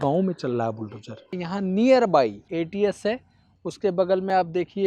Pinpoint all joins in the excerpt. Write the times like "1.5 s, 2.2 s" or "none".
1.3 s, 2.4 s